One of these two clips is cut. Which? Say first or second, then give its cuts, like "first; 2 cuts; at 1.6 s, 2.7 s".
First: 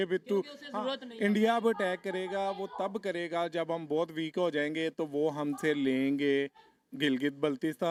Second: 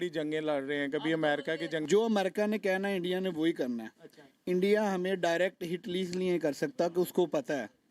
second; 1 cut; at 1.8 s